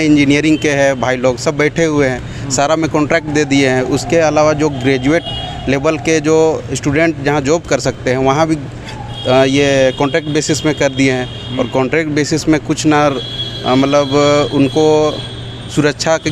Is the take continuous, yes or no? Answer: yes